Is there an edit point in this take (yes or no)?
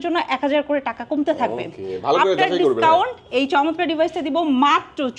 no